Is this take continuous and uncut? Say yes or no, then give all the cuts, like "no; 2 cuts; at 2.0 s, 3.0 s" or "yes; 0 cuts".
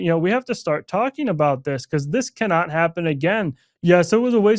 no; 1 cut; at 3.7 s